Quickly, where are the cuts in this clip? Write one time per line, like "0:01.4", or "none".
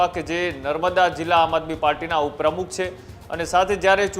none